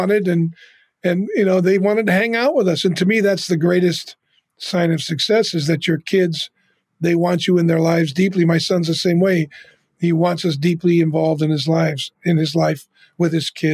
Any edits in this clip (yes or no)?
no